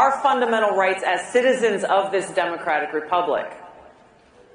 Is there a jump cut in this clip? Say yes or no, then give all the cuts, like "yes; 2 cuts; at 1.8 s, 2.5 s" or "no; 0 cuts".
yes; 1 cut; at 2.9 s